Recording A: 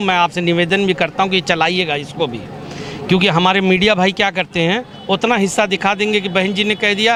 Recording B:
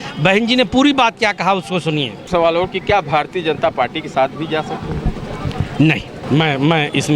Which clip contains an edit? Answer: B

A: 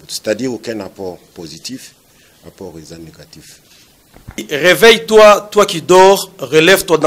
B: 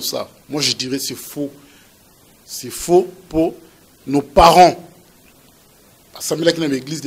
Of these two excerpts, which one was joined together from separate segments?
A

